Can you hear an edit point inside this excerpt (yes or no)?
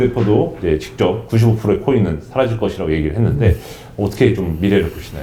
no